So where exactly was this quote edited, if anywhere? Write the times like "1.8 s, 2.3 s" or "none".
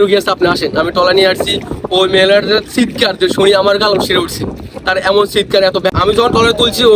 5.9 s